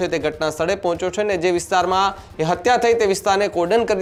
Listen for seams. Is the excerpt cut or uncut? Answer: uncut